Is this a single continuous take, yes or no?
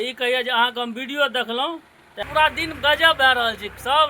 no